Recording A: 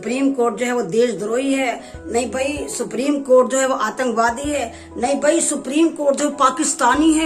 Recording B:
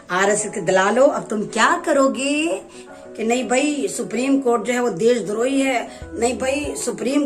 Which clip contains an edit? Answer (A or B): B